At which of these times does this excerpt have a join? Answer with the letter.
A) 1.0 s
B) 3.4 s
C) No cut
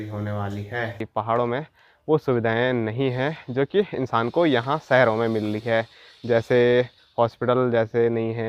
A